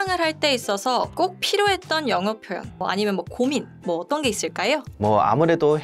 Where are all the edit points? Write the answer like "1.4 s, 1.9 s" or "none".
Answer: 1.1 s, 2.8 s, 4.9 s